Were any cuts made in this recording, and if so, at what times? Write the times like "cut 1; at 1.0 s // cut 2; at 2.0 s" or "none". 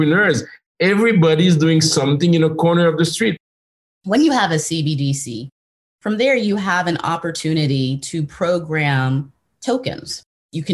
cut 1; at 3.7 s